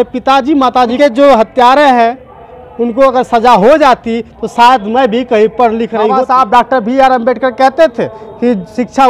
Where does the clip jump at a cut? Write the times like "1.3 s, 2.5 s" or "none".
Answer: 0.9 s, 6.2 s